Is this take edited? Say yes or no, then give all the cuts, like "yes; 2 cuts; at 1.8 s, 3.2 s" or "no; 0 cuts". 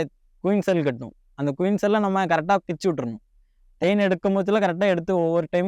no; 0 cuts